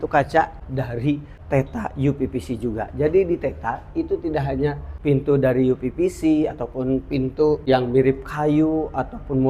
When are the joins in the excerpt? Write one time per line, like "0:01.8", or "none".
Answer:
0:00.9
0:04.9
0:07.6